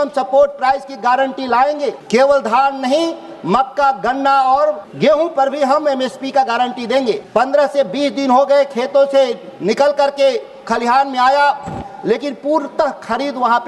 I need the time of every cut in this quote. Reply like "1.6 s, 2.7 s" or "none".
2.0 s, 4.9 s, 7.2 s